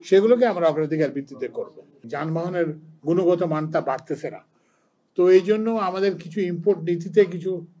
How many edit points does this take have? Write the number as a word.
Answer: one